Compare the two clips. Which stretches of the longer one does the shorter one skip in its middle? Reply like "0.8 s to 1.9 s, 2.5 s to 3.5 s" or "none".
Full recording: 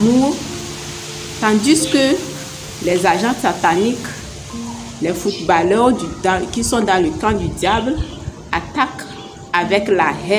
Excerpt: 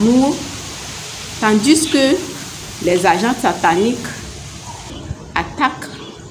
4.9 s to 8.1 s